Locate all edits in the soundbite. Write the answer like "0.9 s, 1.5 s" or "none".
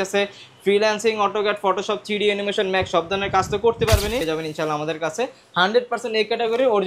4.2 s